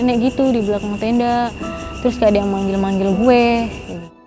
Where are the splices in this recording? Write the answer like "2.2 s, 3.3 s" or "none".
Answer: none

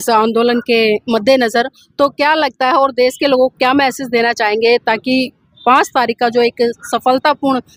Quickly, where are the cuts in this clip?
none

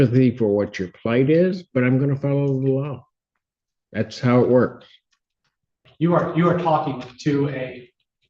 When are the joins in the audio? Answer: 5.8 s

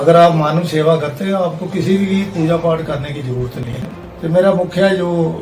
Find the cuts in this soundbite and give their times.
3.7 s

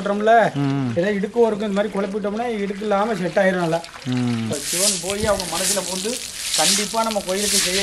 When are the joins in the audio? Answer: 4.5 s

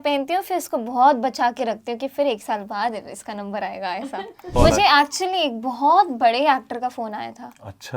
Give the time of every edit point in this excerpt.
4.5 s

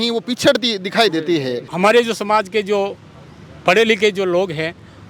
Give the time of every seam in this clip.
1.6 s

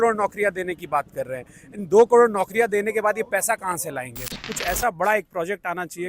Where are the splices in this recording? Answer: 4.5 s

